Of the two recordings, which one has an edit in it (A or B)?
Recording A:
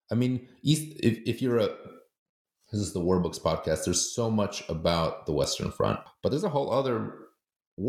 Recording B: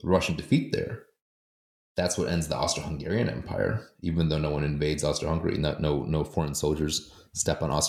A